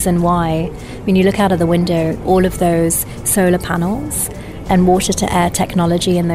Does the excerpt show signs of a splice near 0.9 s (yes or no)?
no